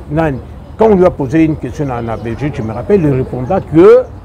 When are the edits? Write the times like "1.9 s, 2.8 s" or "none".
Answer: none